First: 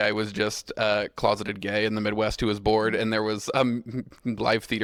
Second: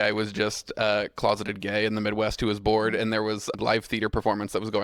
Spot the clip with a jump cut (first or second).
second